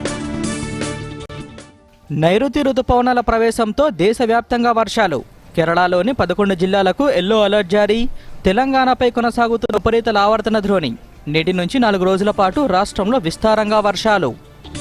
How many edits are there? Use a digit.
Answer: 1